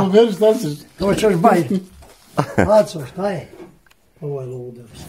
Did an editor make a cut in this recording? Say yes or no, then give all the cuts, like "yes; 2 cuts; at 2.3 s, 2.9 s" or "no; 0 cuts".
no; 0 cuts